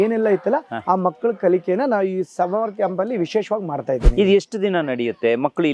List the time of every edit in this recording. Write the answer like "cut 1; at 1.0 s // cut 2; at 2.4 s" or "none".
none